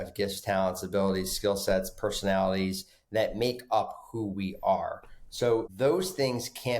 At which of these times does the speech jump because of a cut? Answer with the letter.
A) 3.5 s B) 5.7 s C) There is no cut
B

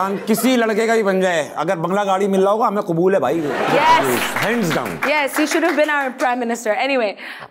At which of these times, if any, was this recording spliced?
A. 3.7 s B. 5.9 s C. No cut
A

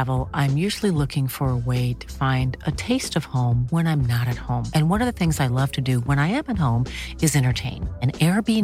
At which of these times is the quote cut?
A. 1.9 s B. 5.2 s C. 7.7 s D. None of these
D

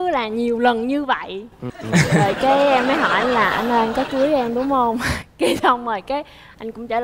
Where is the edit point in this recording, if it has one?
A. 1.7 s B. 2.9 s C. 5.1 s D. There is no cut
A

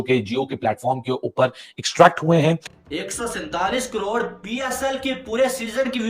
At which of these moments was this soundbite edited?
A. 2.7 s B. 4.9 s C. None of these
A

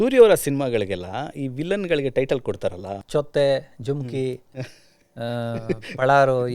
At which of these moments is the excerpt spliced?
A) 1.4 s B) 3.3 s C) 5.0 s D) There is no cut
D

